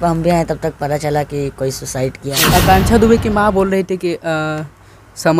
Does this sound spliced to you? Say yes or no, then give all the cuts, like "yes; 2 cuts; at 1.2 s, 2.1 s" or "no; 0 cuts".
yes; 1 cut; at 2.4 s